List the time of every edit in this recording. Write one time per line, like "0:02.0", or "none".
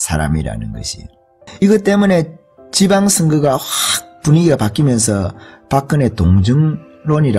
none